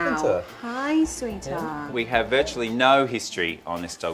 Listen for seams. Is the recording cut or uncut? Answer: cut